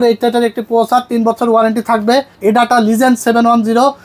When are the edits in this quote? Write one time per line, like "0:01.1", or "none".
0:02.3